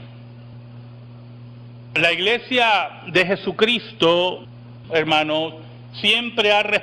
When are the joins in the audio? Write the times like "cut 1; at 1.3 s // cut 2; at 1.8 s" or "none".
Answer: cut 1; at 1.1 s